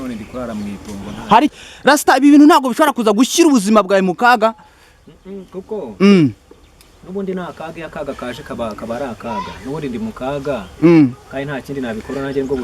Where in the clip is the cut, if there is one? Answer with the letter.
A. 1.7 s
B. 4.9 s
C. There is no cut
A